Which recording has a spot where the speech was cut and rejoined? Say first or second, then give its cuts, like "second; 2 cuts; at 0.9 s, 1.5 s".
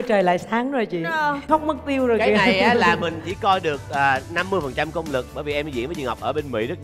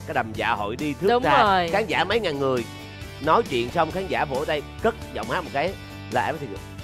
first; 1 cut; at 1.5 s